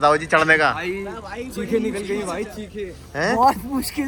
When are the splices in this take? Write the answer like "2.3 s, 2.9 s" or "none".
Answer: none